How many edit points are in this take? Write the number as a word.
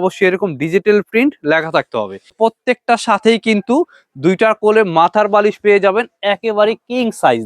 one